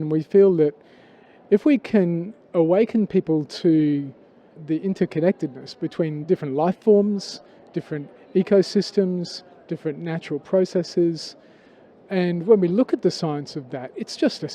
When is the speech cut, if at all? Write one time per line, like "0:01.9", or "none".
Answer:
0:04.6